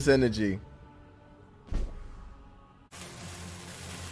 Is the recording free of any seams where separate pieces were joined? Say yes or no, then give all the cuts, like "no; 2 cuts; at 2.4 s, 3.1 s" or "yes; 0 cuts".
no; 1 cut; at 2.9 s